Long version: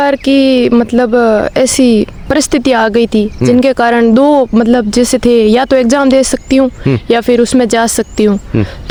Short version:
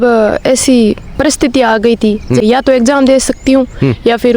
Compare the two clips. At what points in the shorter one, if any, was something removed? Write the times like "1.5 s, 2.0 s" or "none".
2.4 s